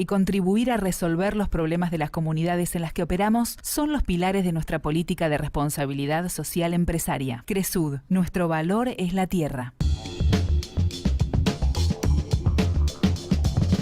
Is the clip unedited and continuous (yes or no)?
yes